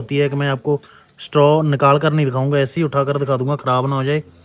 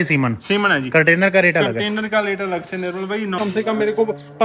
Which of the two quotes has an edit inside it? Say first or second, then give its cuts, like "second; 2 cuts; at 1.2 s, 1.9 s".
second; 1 cut; at 3.4 s